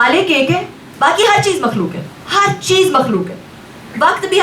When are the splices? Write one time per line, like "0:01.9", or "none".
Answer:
none